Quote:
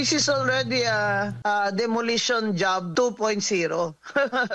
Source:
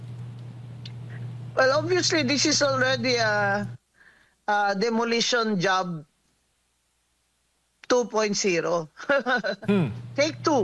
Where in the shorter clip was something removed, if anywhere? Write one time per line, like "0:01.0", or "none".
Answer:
0:01.3
0:02.9